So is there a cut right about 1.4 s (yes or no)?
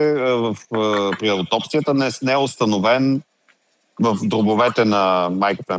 no